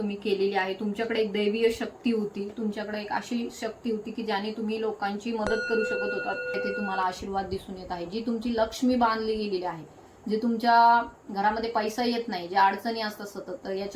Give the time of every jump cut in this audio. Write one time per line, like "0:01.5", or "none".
0:06.6